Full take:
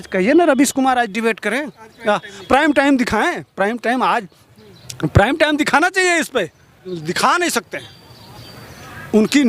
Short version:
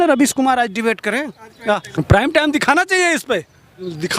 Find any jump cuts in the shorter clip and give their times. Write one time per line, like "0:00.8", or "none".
0:01.9